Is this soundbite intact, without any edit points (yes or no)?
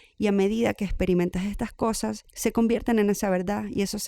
no